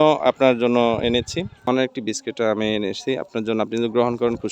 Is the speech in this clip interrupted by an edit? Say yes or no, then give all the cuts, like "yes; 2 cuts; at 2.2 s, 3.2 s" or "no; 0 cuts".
yes; 1 cut; at 1.6 s